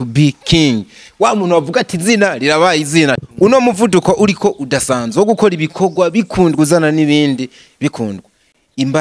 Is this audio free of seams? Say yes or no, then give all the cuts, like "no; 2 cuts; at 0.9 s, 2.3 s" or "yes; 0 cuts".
no; 1 cut; at 3.2 s